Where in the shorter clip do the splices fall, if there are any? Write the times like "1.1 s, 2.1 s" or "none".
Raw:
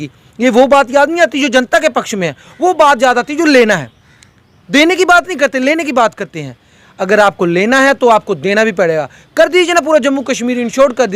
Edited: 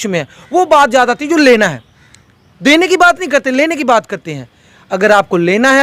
none